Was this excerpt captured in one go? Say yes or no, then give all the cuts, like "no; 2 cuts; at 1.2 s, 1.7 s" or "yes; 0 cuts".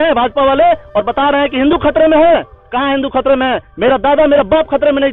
yes; 0 cuts